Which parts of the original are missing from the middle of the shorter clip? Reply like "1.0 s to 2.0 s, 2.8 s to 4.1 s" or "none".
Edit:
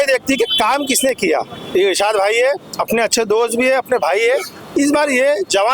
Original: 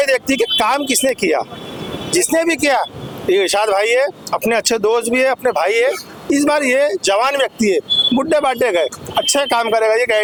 1.6 s to 3.1 s

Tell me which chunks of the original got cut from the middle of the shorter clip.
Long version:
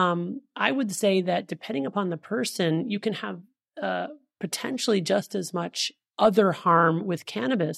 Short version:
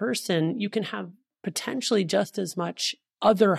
3.6 s to 4.2 s

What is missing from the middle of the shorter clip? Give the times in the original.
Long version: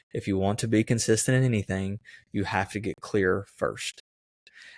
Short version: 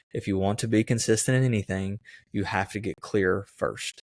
none

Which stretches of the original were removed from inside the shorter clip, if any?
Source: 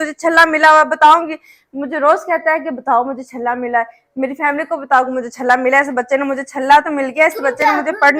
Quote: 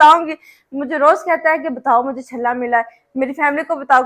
none

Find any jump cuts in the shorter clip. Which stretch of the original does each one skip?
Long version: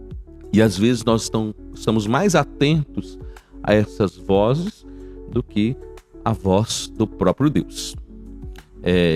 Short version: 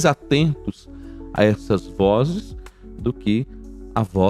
none

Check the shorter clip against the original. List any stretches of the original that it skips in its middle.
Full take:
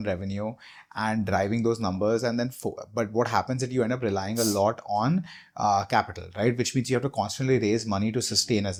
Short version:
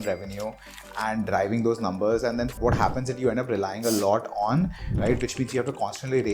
2.6 s to 3.1 s, 5.4 s to 6.2 s

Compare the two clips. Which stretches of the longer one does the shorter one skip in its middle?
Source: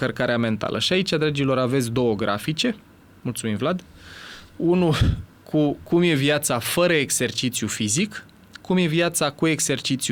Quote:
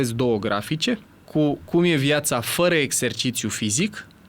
2.9 s to 5.3 s

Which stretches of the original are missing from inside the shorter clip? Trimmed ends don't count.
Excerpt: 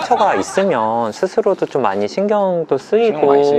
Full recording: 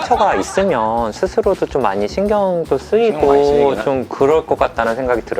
none

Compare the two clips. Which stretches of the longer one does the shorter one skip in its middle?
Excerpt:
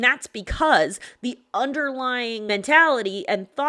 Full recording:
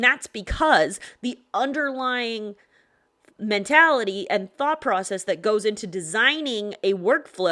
2.5 s to 3.5 s

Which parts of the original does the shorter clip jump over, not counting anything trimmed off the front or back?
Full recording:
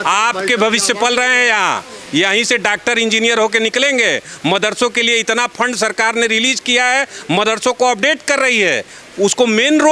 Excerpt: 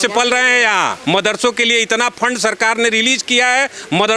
1.8 s to 4.3 s

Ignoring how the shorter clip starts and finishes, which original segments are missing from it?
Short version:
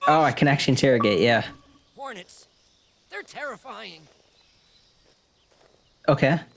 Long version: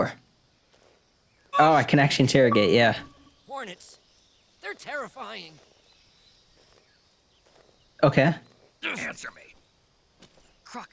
6.7 s to 7.1 s

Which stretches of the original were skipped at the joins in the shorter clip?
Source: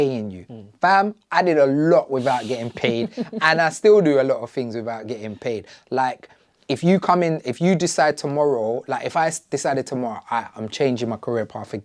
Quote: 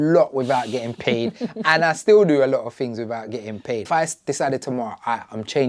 5.6 s to 9.1 s

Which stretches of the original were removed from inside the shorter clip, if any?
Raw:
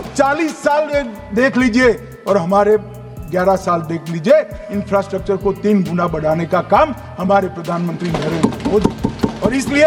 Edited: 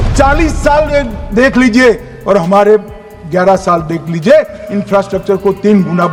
none

